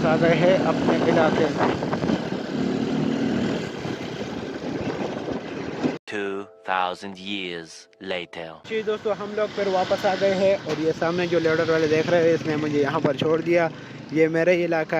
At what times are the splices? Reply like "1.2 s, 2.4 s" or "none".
none